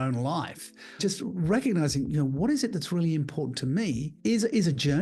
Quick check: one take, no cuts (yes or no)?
no